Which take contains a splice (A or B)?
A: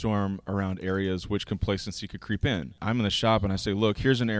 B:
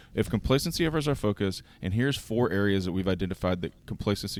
A